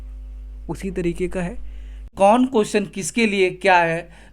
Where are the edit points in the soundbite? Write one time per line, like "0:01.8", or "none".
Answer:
0:02.1

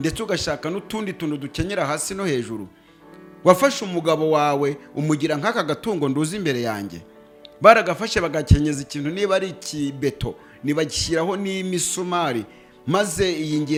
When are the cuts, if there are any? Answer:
none

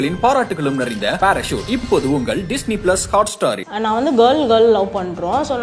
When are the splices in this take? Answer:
0:03.7

